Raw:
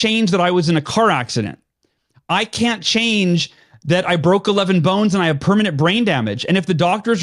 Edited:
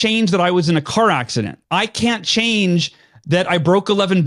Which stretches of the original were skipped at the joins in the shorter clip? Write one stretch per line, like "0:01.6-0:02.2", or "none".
0:01.6-0:02.2